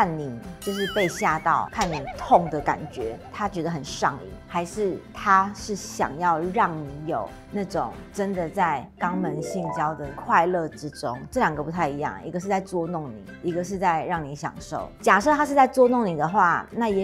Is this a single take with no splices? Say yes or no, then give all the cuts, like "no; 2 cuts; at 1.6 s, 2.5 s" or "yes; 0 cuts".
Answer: yes; 0 cuts